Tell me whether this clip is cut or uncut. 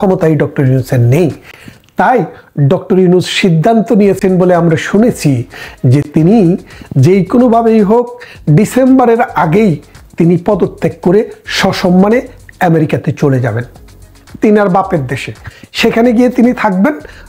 uncut